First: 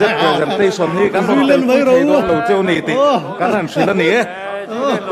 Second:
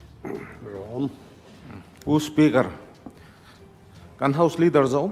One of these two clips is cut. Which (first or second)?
first